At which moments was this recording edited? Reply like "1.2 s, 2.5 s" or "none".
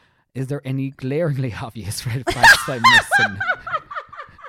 none